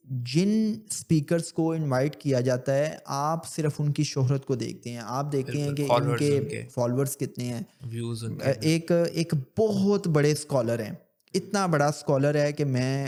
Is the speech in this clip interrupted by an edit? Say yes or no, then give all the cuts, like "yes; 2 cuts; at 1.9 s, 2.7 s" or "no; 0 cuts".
no; 0 cuts